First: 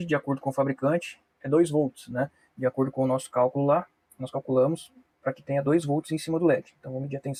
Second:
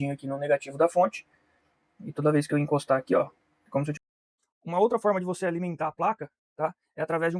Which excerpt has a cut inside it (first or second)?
second